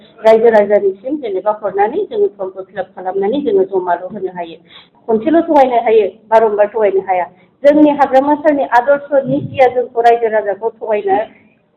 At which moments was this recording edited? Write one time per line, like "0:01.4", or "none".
0:04.9